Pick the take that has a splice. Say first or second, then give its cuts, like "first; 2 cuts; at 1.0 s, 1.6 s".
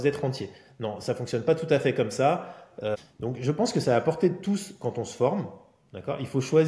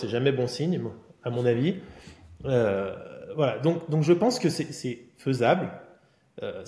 first; 1 cut; at 2.9 s